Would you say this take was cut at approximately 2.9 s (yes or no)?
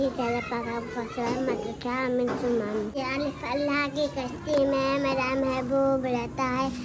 yes